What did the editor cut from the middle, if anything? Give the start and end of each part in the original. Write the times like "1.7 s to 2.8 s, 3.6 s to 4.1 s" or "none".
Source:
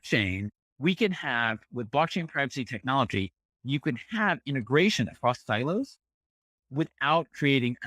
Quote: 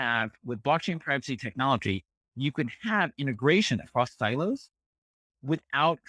none